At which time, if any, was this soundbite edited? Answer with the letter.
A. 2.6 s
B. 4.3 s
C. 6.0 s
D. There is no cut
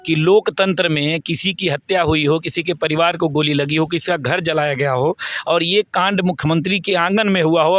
D